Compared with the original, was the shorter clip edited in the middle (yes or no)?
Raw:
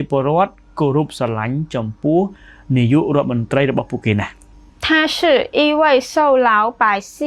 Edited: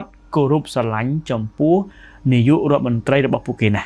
no